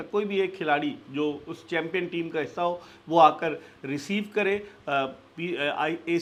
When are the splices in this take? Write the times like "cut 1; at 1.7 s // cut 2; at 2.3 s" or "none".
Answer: none